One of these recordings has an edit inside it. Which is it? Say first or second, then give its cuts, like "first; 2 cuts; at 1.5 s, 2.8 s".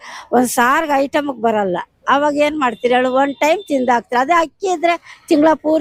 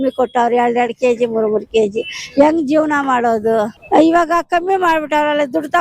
second; 1 cut; at 3.8 s